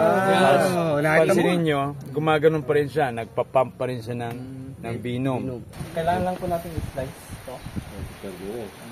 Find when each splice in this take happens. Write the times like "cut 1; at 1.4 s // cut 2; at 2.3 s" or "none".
cut 1; at 5.7 s